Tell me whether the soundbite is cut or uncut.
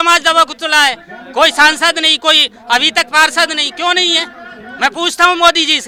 uncut